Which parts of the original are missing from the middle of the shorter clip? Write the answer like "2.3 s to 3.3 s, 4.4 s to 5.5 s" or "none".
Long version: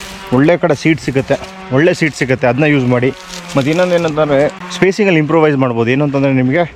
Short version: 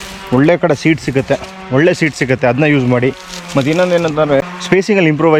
4.4 s to 4.5 s